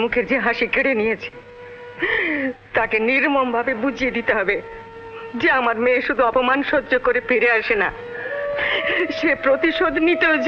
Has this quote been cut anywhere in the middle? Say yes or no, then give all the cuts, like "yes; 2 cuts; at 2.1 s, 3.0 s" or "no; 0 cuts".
no; 0 cuts